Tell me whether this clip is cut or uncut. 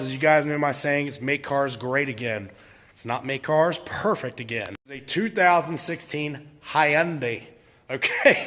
uncut